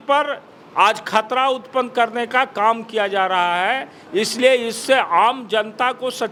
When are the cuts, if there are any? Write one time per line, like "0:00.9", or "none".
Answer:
none